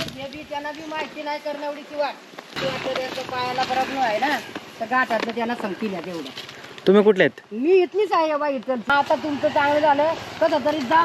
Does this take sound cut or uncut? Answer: cut